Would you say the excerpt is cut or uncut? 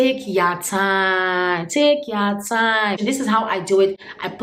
cut